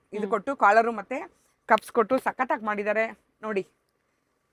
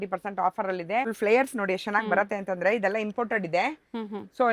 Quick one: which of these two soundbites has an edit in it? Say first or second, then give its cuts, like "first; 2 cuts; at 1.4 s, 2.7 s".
second; 1 cut; at 1.1 s